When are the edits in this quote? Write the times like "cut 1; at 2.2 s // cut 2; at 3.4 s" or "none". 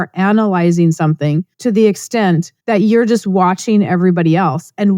cut 1; at 1.5 s // cut 2; at 2.5 s